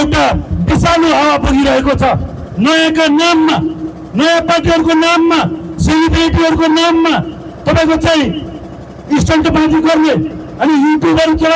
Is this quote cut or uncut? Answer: uncut